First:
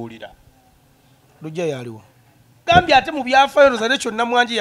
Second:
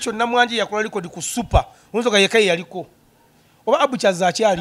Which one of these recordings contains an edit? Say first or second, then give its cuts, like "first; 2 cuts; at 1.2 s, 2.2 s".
first; 1 cut; at 2.5 s